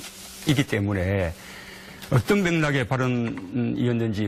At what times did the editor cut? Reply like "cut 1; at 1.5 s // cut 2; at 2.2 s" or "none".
none

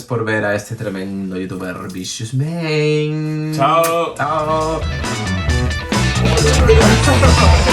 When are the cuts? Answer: none

